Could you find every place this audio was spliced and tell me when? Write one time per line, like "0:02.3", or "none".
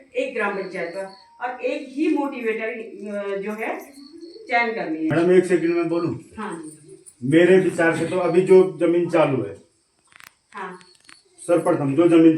0:05.1

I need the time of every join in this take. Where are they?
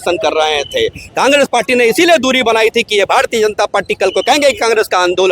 none

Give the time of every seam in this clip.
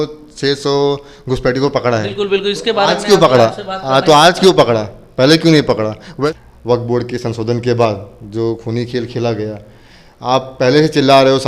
0:06.1

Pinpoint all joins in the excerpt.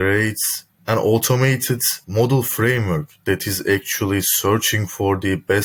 none

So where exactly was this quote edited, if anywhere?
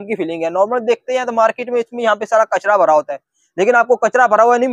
none

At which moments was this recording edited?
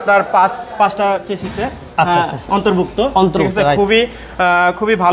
none

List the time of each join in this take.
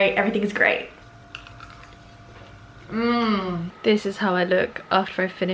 0:00.9
0:03.7

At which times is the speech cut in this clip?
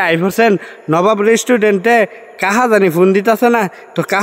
none

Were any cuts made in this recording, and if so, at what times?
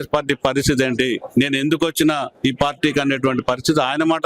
0:01.2
0:02.3

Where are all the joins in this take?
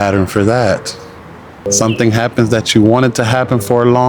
0:01.7

